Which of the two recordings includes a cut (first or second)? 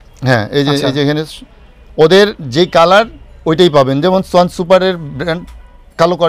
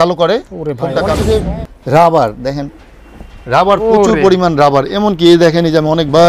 second